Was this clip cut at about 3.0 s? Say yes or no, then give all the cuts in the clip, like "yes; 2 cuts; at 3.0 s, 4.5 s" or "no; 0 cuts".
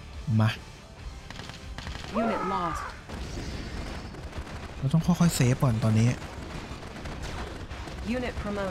yes; 1 cut; at 3.0 s